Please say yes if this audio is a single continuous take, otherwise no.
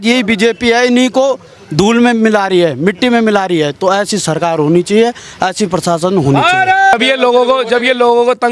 no